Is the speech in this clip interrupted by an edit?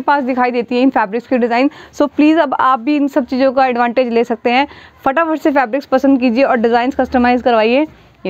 no; 0 cuts

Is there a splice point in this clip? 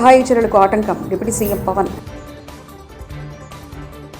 no; 0 cuts

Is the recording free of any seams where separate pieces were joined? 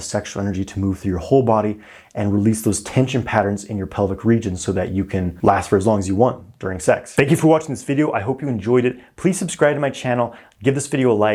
yes; 0 cuts

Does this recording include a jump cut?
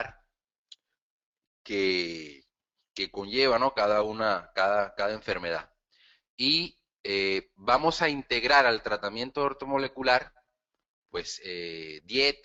no; 0 cuts

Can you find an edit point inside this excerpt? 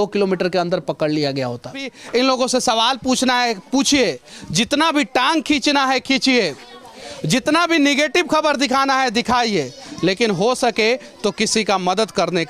yes; 1 cut; at 2.0 s

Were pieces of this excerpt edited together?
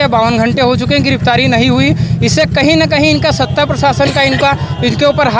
no; 0 cuts

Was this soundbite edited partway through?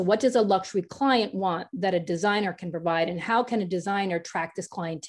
no; 0 cuts

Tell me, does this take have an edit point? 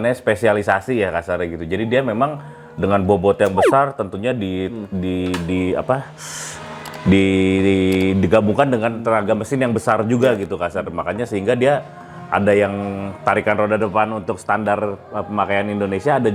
no; 0 cuts

